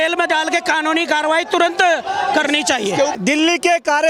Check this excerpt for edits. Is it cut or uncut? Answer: cut